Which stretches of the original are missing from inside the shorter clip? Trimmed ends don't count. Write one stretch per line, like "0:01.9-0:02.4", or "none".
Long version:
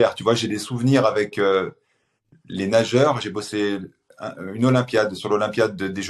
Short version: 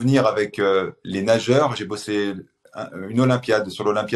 0:01.8-0:02.5